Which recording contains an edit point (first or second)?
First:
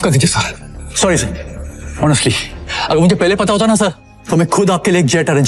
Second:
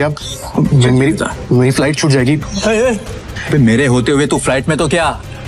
second